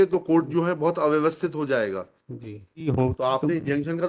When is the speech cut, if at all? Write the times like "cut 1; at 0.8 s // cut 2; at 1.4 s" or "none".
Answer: cut 1; at 2.9 s